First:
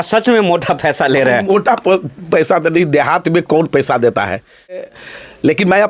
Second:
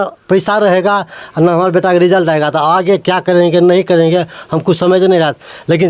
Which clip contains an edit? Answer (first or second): first